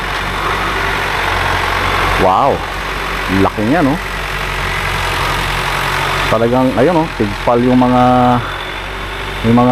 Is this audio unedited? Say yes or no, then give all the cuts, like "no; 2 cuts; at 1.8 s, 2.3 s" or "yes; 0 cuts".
yes; 0 cuts